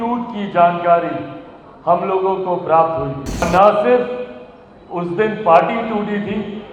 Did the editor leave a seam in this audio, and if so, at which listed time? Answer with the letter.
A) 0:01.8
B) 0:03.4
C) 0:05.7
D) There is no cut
B